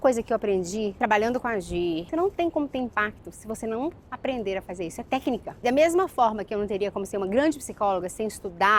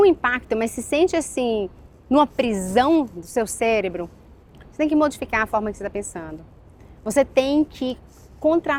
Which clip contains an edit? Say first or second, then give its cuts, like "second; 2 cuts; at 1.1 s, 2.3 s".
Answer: first; 2 cuts; at 2.0 s, 5.6 s